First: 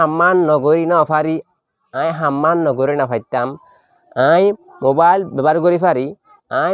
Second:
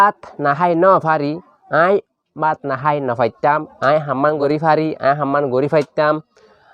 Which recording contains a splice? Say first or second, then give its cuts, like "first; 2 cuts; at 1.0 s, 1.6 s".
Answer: second; 1 cut; at 4.4 s